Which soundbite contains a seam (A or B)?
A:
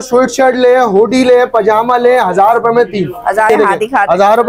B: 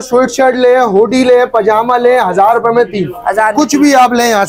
A